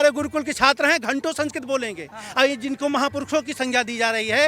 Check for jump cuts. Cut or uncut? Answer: uncut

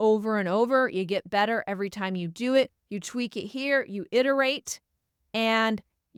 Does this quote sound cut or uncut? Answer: uncut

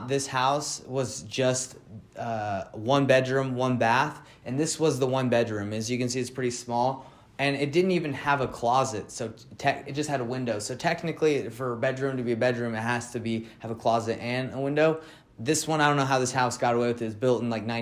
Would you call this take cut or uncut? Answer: uncut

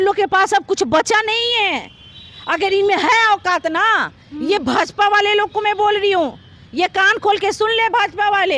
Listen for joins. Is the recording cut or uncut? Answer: uncut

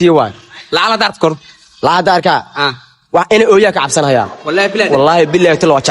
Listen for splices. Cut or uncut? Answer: uncut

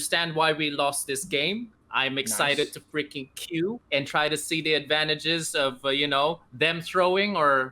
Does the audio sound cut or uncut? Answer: cut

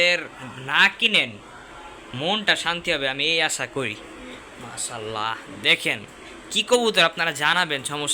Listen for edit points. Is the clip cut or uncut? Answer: uncut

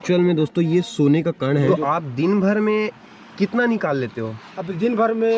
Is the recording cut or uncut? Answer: cut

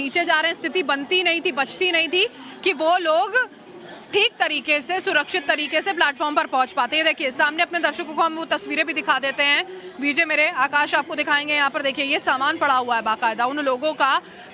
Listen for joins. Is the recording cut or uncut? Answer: uncut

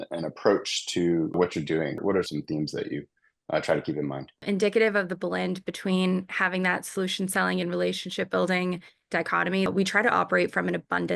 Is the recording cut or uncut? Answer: cut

